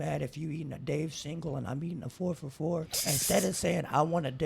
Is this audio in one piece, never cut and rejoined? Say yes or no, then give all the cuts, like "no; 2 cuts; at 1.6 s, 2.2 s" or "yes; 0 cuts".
no; 1 cut; at 2.9 s